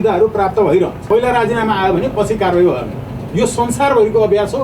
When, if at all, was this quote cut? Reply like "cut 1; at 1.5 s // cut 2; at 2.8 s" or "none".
cut 1; at 1.0 s